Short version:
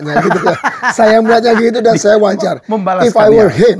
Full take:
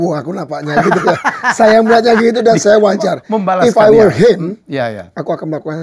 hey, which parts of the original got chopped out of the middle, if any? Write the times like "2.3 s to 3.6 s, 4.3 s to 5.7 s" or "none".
none